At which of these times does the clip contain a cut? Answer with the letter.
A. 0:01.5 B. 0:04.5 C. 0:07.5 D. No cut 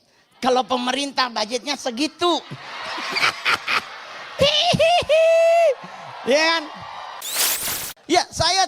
C